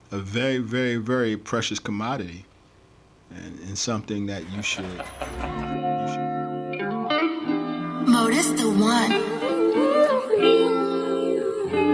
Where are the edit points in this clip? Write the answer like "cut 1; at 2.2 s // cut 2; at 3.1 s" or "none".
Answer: cut 1; at 5.0 s